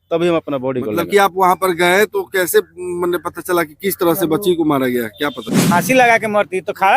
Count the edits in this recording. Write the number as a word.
one